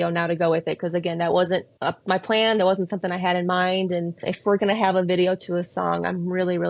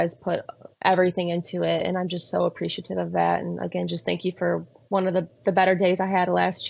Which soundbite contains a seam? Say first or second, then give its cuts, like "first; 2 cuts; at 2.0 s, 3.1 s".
first; 2 cuts; at 1.7 s, 4.2 s